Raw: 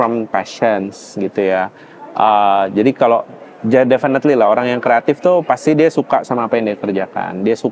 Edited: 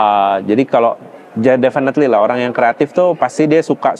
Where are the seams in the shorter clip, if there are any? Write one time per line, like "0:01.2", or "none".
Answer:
none